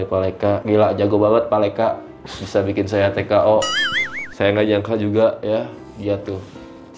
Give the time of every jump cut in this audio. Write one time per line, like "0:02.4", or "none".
none